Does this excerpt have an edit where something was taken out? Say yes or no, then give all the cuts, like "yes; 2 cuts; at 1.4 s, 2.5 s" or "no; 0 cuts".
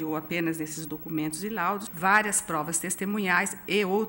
yes; 1 cut; at 1.9 s